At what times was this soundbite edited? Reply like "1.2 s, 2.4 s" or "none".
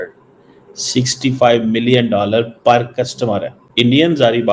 3.6 s